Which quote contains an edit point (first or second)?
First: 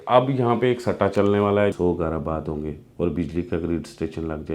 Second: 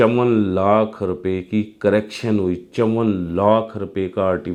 first